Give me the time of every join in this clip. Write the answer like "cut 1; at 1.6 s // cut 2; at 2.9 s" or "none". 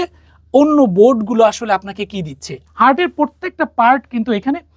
cut 1; at 2.5 s